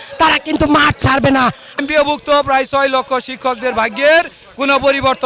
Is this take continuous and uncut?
no; 1 cut; at 1.8 s

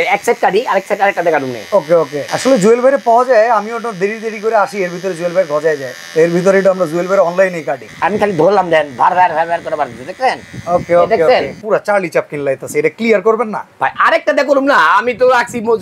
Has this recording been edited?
yes; 4 cuts; at 2.2 s, 5.9 s, 7.8 s, 11.6 s

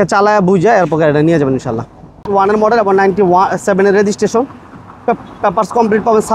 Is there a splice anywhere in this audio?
yes; 1 cut; at 2.3 s

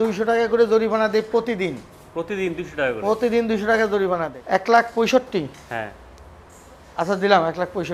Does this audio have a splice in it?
yes; 1 cut; at 4.2 s

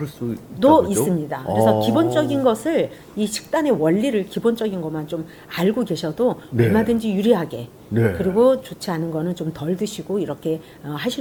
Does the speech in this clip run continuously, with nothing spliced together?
yes; 0 cuts

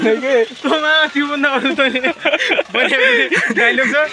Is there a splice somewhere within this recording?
no; 0 cuts

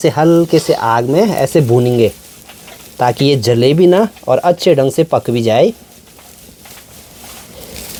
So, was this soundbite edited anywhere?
no; 0 cuts

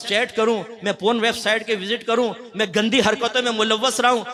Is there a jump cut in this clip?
no; 0 cuts

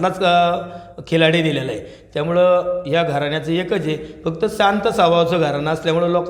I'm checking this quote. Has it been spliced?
no; 0 cuts

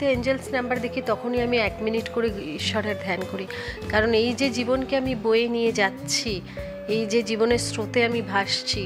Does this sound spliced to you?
no; 0 cuts

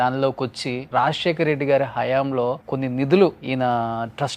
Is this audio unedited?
no; 3 cuts; at 0.8 s, 2.7 s, 3.4 s

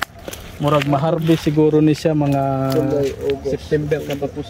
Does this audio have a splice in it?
no; 0 cuts

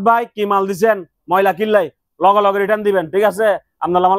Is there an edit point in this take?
no; 0 cuts

